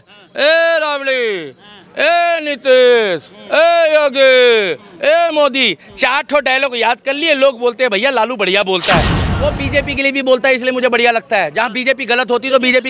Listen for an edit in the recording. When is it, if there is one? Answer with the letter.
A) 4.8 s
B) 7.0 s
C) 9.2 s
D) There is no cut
C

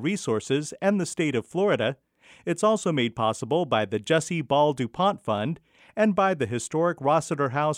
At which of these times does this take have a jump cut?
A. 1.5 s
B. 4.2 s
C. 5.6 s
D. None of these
D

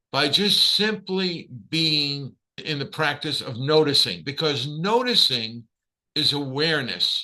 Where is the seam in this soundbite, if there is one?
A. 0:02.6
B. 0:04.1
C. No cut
A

